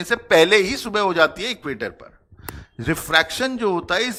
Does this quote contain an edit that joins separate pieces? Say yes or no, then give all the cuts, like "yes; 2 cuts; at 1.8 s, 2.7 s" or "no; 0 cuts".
no; 0 cuts